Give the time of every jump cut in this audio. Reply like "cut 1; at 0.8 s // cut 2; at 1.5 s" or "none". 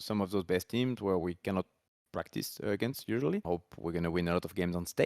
cut 1; at 3.4 s